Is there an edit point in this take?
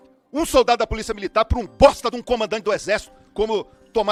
no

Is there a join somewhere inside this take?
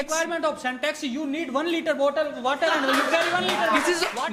no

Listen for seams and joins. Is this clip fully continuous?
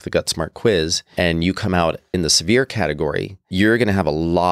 no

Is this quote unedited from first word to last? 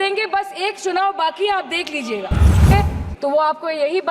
no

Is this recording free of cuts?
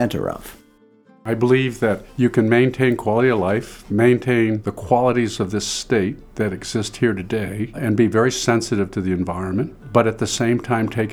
no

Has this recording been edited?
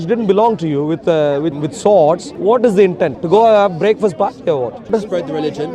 yes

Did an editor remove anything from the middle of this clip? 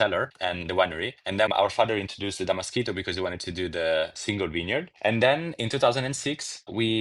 yes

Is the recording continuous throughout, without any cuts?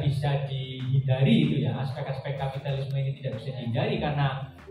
yes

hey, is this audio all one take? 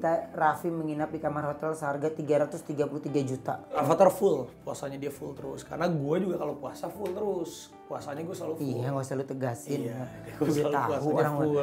no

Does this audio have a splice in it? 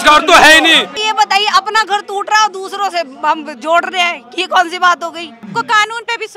yes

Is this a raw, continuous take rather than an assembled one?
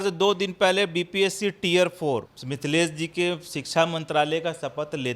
no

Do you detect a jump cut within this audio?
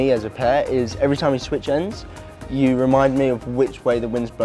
no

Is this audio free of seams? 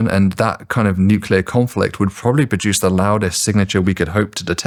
yes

